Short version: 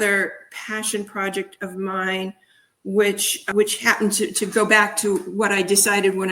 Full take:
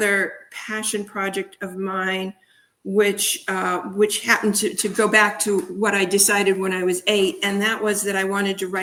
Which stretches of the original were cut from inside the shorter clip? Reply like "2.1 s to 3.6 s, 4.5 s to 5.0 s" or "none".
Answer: 3.4 s to 3.9 s